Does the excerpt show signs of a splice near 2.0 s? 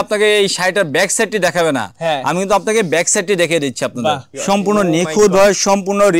no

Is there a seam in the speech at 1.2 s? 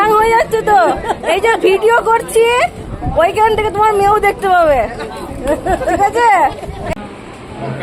no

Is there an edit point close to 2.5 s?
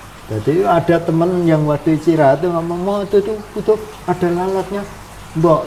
no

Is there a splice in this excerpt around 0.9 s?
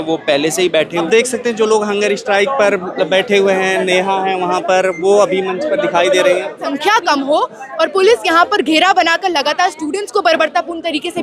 yes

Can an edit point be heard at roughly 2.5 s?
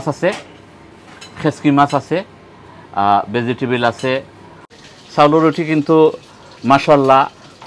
no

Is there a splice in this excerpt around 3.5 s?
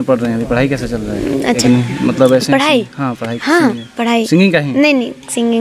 no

